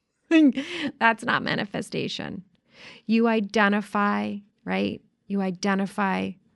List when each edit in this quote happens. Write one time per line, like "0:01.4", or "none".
0:04.5